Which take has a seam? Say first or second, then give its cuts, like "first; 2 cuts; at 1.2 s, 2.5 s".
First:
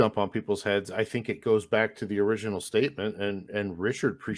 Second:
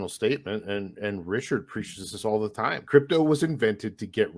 second; 1 cut; at 2.8 s